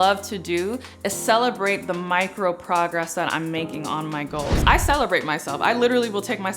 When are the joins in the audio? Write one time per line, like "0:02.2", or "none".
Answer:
0:04.5